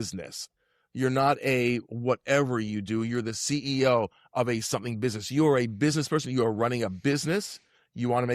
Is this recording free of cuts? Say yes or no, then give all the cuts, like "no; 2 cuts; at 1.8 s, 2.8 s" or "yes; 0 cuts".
yes; 0 cuts